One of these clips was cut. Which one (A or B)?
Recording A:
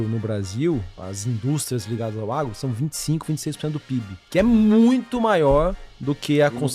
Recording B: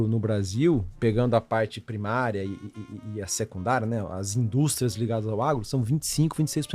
A